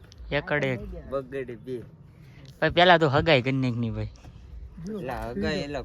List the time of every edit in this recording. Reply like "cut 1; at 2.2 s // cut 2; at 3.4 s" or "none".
cut 1; at 2.2 s